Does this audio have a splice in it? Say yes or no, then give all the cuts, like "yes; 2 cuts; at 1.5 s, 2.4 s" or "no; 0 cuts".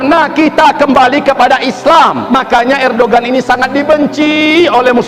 yes; 1 cut; at 2.2 s